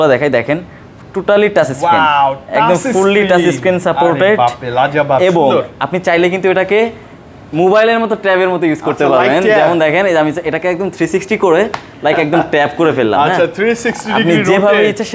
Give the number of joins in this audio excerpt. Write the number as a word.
zero